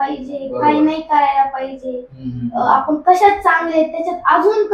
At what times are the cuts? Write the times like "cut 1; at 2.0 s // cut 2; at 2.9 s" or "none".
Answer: none